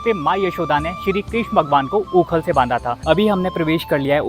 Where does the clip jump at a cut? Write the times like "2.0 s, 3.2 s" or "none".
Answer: 3.0 s